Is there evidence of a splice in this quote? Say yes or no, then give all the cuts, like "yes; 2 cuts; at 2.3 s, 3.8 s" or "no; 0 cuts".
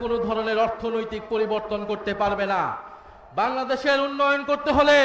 no; 0 cuts